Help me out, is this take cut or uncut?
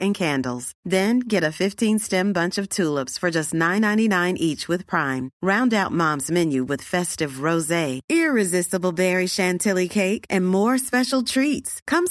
uncut